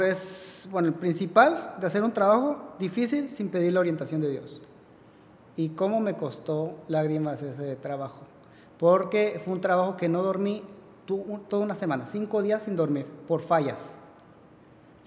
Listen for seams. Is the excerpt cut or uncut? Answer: uncut